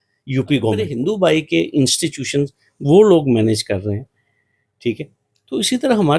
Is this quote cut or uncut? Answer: cut